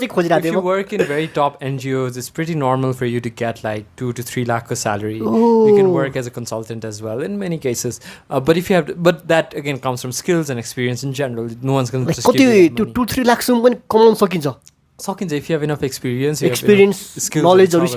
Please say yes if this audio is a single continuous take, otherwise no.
yes